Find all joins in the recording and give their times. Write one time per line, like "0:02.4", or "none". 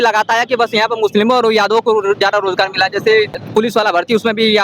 0:03.4